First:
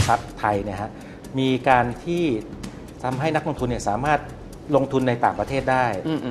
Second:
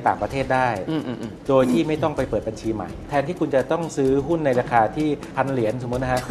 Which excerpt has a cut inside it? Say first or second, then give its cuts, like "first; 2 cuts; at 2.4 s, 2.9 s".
second; 2 cuts; at 3.0 s, 5.3 s